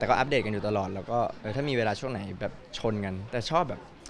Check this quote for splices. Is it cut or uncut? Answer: uncut